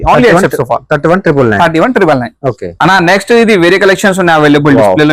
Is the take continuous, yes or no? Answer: yes